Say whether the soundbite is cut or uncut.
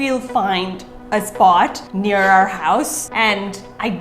cut